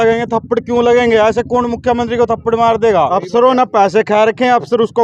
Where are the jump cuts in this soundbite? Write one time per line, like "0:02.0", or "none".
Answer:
0:03.2